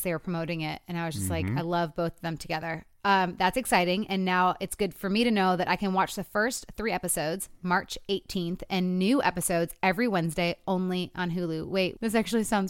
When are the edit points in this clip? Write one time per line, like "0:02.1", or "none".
0:08.3